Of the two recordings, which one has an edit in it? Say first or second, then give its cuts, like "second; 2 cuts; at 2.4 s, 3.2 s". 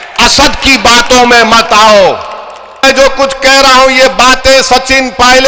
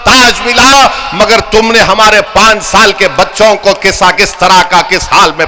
first; 1 cut; at 2.8 s